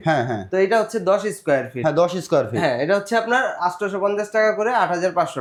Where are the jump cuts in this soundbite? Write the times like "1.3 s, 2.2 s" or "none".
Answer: none